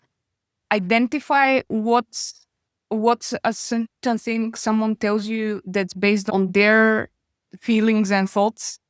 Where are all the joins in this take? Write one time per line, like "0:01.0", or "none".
none